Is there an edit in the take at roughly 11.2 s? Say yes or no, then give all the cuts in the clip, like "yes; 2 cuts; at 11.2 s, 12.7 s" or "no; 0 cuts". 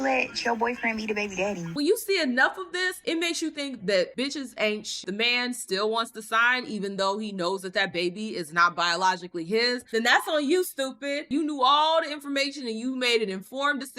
yes; 3 cuts; at 1.7 s, 5.0 s, 11.2 s